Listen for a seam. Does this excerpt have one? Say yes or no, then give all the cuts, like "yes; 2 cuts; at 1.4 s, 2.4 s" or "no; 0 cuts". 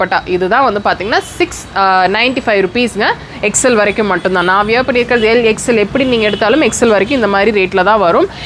no; 0 cuts